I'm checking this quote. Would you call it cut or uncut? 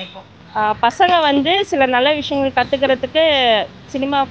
uncut